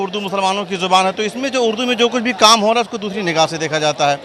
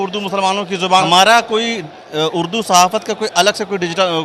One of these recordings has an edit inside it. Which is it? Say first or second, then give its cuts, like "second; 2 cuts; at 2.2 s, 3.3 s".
second; 1 cut; at 1.0 s